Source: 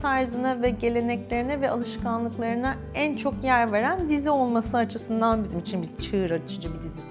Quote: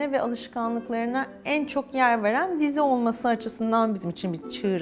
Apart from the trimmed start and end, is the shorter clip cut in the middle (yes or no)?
no